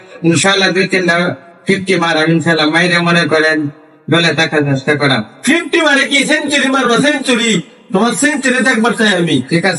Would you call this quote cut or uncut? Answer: uncut